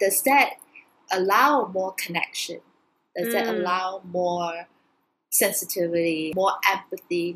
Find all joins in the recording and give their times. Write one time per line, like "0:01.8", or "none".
0:06.3